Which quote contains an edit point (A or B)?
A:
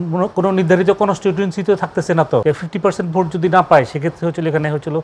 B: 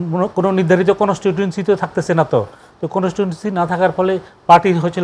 A